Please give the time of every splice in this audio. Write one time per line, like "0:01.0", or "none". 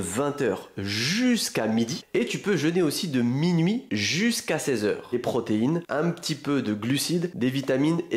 0:05.1

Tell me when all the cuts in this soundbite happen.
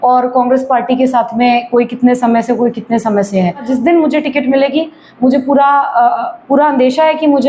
0:03.7

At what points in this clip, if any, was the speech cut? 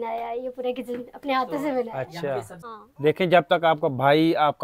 0:02.6

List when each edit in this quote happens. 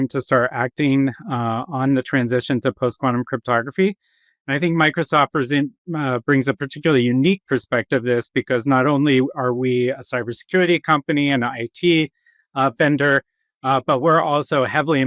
none

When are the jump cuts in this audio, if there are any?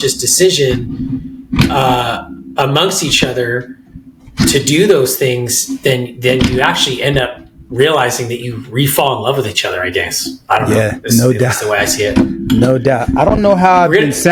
none

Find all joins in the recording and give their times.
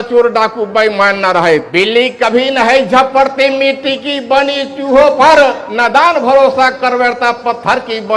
0:01.7
0:05.7

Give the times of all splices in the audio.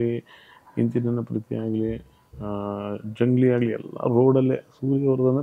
none

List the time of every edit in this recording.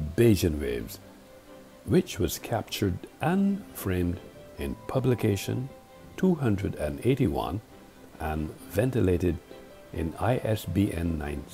0:09.9

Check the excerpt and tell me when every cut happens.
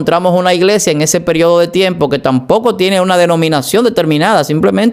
none

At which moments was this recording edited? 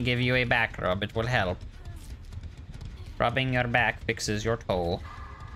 none

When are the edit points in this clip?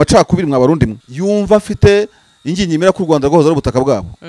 0:01.1

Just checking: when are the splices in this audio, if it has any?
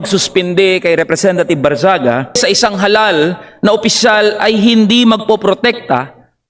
0:02.4

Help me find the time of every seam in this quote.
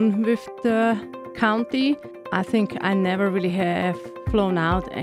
0:02.1

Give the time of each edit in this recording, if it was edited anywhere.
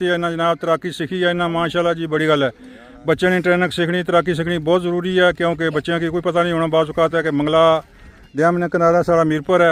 none

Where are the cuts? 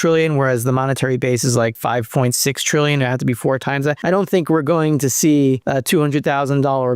0:01.8
0:04.0
0:05.6

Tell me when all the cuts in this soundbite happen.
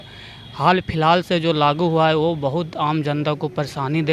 none

